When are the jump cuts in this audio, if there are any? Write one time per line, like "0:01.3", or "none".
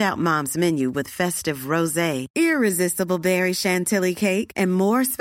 none